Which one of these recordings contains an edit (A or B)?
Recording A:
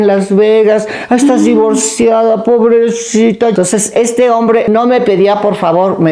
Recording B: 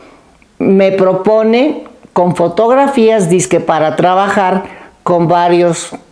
A